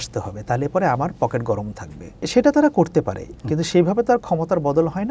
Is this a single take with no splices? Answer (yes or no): no